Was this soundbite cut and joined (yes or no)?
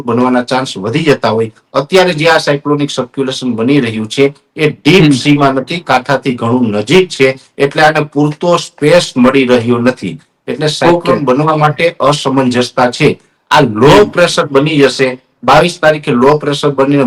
no